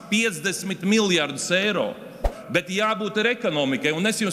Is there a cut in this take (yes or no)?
yes